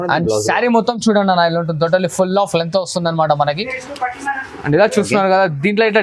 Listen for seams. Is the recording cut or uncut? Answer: uncut